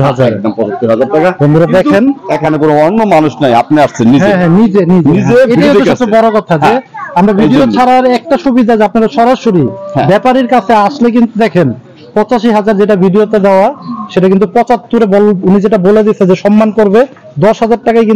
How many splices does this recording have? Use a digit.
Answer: 0